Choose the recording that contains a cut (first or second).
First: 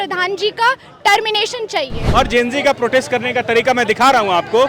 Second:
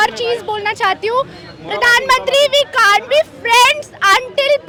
first